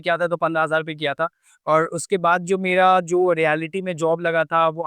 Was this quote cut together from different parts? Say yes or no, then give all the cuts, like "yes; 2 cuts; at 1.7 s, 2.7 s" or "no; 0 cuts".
no; 0 cuts